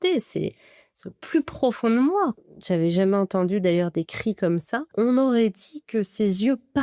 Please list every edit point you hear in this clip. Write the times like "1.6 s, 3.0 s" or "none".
2.4 s, 4.9 s